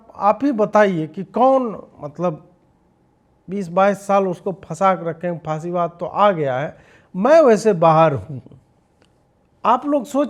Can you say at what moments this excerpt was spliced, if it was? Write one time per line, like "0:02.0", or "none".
none